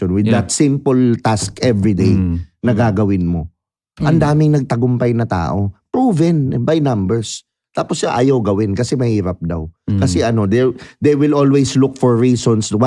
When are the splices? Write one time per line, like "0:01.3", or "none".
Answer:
none